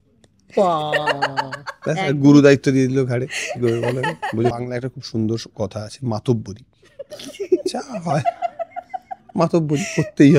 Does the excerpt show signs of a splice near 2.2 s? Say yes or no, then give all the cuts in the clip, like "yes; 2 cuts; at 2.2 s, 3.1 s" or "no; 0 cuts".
no; 1 cut; at 4.5 s